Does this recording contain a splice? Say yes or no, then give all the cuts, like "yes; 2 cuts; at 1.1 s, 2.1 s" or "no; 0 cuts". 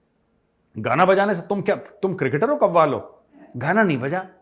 yes; 1 cut; at 3.5 s